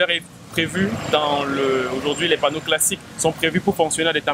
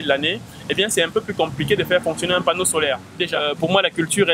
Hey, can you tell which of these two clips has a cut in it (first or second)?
second